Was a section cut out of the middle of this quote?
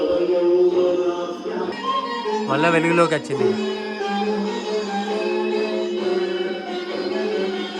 yes; 1 cut; at 1.7 s

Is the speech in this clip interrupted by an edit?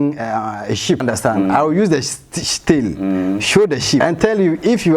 yes; 2 cuts; at 1.0 s, 4.0 s

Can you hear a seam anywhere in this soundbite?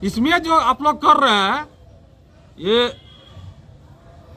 no; 0 cuts

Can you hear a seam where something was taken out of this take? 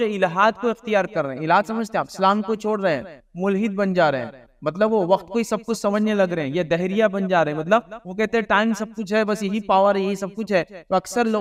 no; 0 cuts

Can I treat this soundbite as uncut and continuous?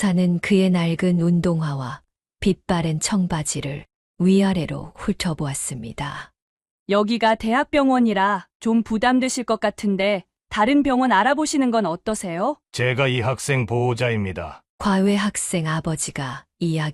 no; 1 cut; at 12.6 s

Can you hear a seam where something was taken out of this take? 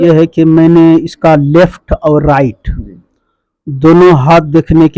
no; 0 cuts

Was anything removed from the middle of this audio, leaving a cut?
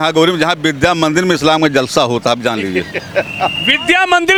no; 0 cuts

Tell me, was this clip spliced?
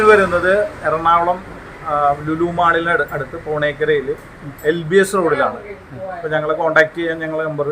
no; 0 cuts

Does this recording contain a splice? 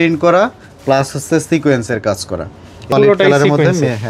yes; 1 cut; at 2.8 s

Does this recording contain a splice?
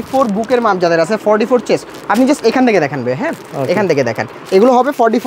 no; 0 cuts

